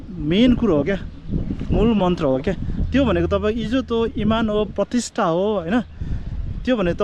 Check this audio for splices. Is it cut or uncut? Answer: uncut